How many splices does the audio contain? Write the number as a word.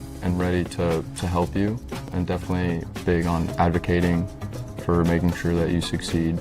zero